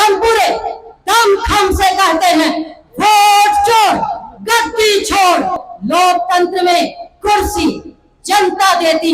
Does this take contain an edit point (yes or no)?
yes